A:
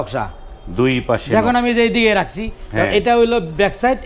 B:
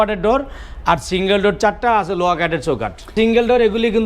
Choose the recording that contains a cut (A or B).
B